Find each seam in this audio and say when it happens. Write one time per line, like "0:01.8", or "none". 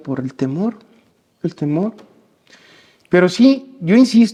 none